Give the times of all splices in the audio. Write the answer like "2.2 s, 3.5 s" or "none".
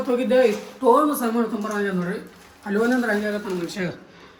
none